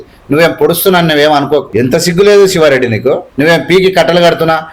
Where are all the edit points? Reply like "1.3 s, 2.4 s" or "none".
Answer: 1.7 s, 3.3 s